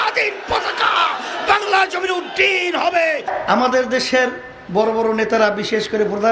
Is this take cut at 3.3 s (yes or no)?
yes